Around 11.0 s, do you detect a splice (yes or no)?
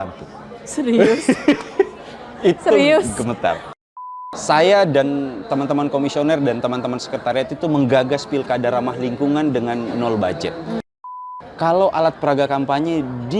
yes